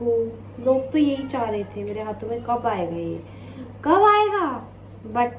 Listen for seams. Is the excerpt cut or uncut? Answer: cut